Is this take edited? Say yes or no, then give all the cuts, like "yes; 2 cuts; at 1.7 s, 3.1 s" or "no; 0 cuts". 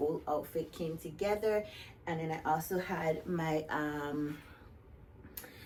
no; 0 cuts